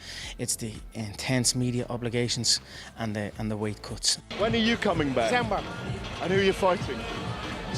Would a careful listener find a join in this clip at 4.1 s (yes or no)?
yes